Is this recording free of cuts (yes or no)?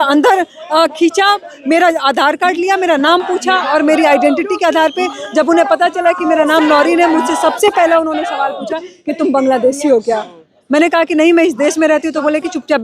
yes